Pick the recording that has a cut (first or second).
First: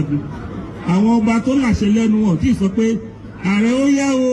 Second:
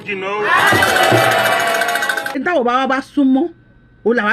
second